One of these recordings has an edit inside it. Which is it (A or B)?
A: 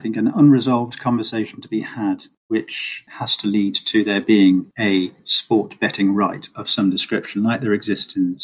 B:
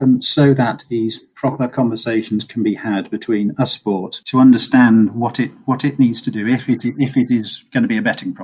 A